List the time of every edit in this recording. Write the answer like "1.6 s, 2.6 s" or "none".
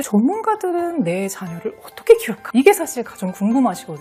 none